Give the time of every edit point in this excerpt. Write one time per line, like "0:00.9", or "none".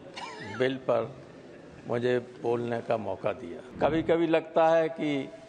0:03.6